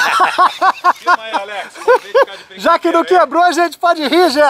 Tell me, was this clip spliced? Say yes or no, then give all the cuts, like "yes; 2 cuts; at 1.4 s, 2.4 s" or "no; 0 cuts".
no; 0 cuts